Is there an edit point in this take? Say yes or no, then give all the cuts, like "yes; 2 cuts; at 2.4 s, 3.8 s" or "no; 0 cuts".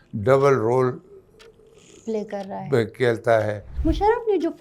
yes; 1 cut; at 3.7 s